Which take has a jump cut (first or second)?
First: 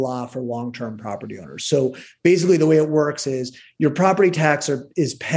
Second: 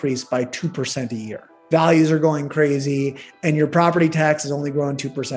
second